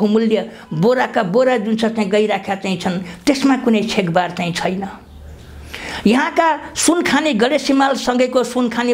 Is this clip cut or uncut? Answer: uncut